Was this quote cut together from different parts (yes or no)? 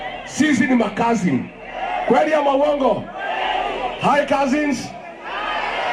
no